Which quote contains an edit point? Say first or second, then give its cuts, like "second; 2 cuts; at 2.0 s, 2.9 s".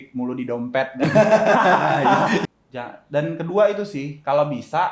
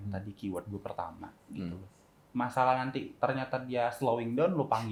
first; 1 cut; at 2.5 s